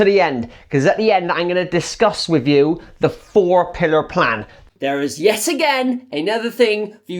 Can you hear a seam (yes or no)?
yes